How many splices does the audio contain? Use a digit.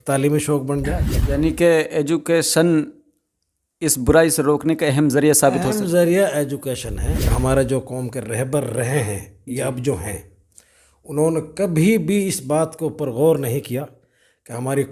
2